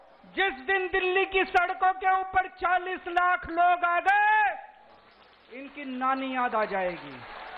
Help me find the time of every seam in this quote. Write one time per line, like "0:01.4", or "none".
none